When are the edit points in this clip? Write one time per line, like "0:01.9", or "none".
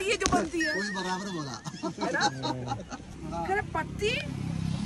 0:03.1